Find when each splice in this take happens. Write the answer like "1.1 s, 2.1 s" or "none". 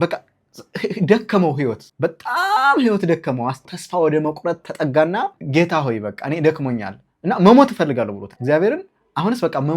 1.8 s, 3.6 s, 5.4 s, 8.3 s